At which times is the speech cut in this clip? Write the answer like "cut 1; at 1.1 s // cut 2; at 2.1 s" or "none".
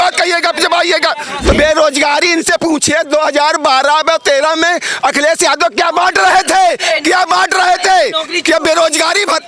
cut 1; at 1.5 s